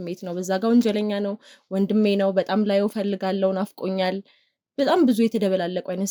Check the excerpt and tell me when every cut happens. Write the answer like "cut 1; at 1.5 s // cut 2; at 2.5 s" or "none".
none